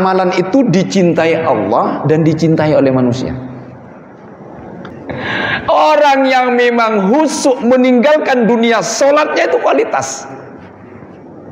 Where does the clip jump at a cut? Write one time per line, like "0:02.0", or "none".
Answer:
0:04.9

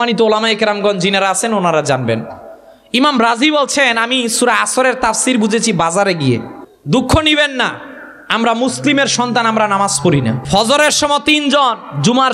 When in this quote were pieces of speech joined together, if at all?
0:06.6
0:10.4

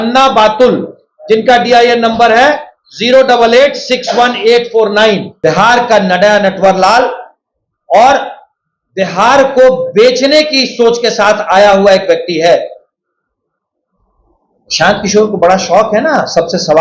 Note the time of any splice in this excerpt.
0:05.3

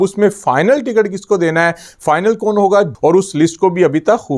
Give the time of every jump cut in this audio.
0:02.9

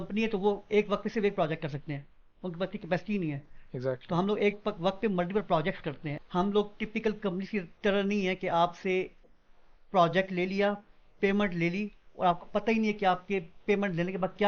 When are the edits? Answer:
0:06.1

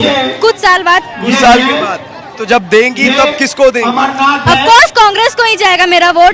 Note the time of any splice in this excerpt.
none

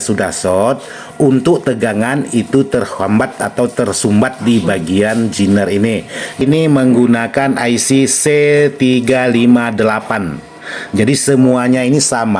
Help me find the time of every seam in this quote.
0:06.4

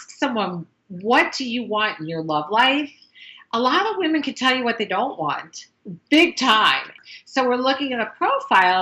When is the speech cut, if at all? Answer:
0:06.9

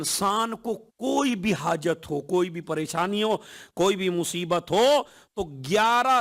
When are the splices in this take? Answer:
none

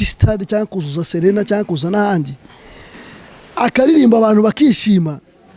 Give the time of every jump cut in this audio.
none

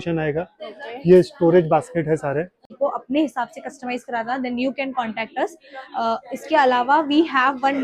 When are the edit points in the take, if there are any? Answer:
0:02.7

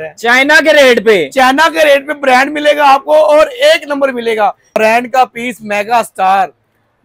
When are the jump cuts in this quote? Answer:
0:04.8

